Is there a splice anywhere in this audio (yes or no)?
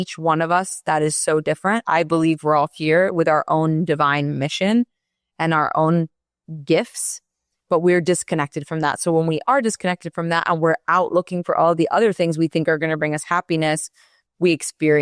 yes